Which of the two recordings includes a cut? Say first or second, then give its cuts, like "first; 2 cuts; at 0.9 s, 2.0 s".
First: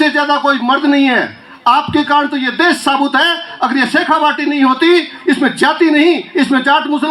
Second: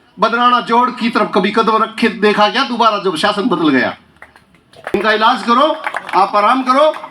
second; 1 cut; at 4.9 s